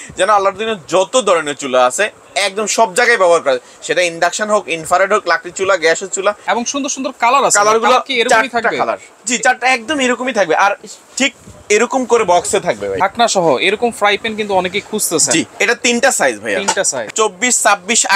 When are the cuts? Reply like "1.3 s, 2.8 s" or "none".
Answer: 6.4 s, 13.0 s, 17.1 s

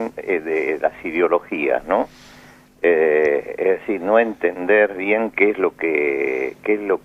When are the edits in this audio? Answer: none

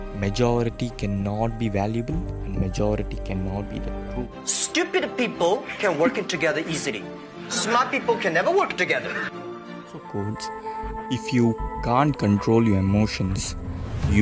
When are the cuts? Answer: 4.3 s, 10.1 s

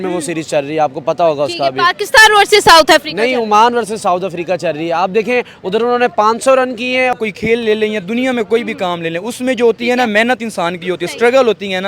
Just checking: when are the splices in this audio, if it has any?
7.1 s

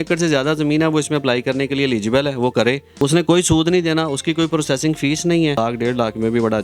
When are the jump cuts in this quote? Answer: 2.9 s, 5.6 s

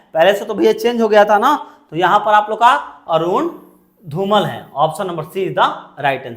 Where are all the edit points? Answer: none

